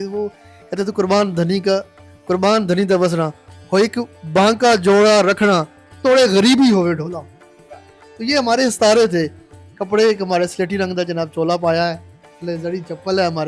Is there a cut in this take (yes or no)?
no